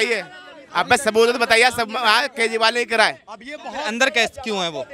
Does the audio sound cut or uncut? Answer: uncut